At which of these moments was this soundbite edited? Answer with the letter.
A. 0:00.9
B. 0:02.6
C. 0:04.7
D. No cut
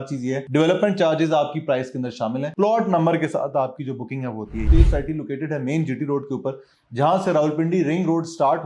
C